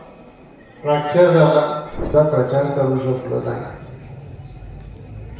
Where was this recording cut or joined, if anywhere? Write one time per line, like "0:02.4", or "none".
0:02.0